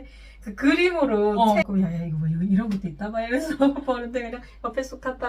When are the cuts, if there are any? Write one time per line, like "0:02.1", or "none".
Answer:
0:01.7